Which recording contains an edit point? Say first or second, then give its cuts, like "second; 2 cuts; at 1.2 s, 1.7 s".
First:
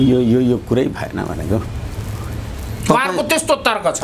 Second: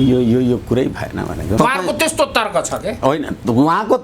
second; 1 cut; at 1.6 s